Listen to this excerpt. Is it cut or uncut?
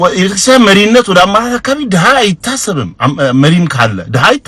uncut